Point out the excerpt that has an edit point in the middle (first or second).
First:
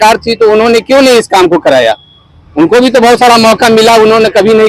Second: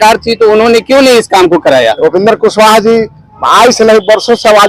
second